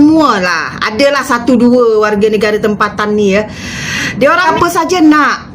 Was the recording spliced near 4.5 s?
yes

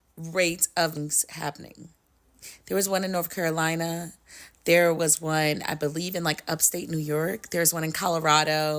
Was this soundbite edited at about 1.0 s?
yes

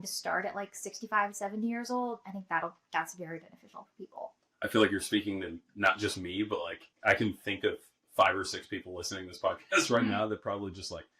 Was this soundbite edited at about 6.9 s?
yes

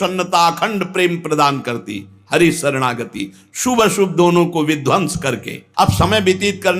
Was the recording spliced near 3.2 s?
no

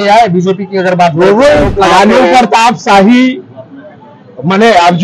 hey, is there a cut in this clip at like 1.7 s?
yes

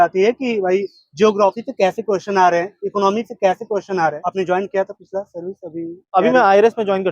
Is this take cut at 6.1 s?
no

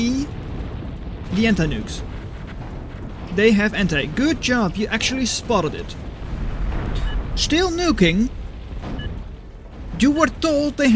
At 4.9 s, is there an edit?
no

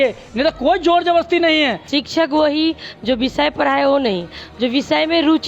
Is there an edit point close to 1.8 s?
yes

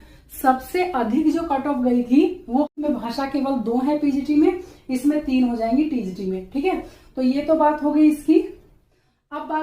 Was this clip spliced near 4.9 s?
no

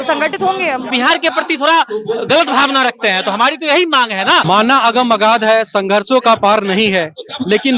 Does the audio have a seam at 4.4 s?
yes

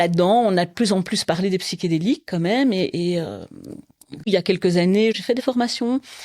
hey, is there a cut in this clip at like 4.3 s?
yes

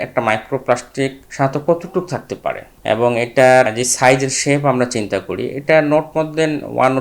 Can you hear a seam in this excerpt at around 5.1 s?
no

